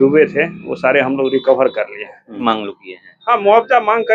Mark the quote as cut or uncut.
cut